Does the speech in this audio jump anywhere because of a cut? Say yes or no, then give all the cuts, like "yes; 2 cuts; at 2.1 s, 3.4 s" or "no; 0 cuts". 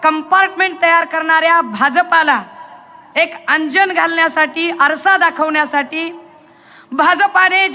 no; 0 cuts